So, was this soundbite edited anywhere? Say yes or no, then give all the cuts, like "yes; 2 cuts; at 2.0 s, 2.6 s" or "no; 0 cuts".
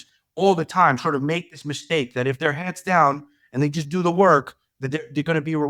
no; 0 cuts